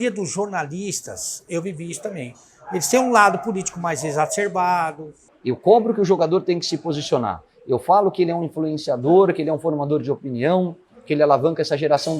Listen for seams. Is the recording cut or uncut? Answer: cut